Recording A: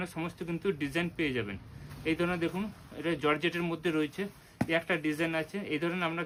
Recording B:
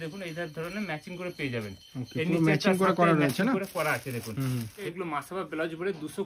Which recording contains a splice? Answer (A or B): B